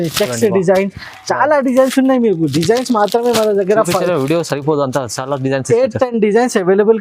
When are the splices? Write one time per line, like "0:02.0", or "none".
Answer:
none